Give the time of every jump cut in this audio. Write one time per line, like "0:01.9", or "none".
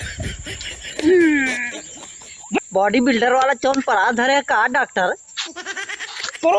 0:02.6